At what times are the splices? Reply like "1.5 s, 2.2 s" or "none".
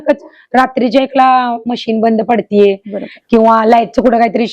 none

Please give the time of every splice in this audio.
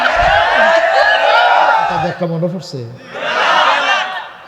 2.0 s

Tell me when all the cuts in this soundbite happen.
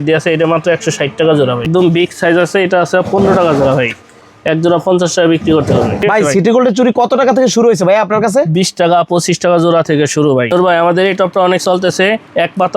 1.6 s, 6.0 s, 10.5 s

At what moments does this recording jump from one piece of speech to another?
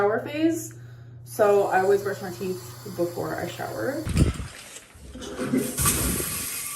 4.1 s

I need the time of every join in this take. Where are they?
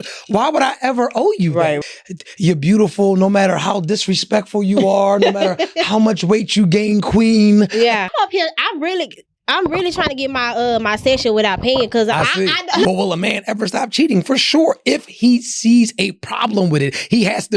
1.8 s, 8.1 s, 12.8 s

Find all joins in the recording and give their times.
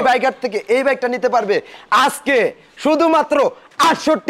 none

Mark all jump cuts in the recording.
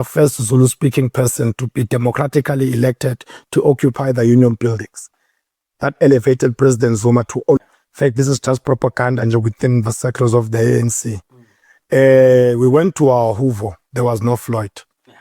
7.6 s

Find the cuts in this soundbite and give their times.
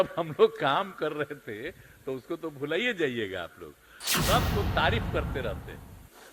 4.1 s

